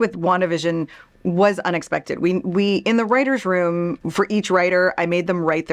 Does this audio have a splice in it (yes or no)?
yes